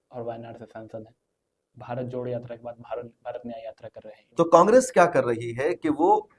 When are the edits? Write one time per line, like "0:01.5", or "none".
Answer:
0:04.2